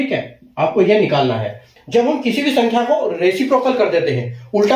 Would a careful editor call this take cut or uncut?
cut